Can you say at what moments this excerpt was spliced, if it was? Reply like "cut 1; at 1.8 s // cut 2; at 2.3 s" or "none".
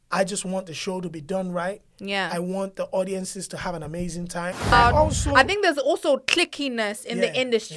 cut 1; at 4.7 s